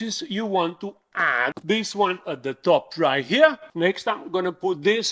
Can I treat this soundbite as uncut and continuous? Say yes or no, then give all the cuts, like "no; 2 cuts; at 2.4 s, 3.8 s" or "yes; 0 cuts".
no; 1 cut; at 1.4 s